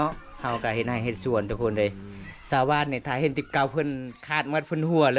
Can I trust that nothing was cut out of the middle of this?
yes; 0 cuts

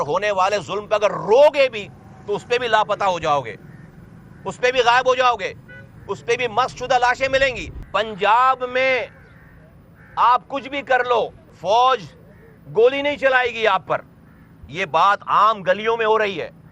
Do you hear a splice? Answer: yes; 2 cuts; at 7.7 s, 11.5 s

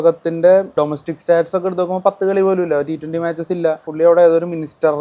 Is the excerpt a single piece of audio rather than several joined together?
no; 2 cuts; at 0.7 s, 3.9 s

